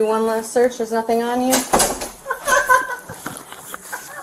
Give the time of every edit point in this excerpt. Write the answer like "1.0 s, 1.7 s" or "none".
none